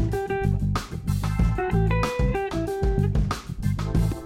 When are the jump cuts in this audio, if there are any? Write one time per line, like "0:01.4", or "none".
none